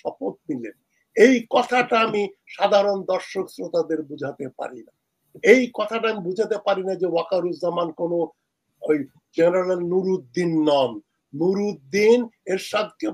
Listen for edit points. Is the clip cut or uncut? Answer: uncut